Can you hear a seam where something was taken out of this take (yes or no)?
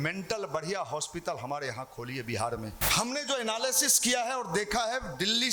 yes